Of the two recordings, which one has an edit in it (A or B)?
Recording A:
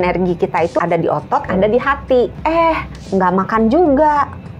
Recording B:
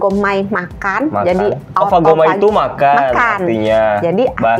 A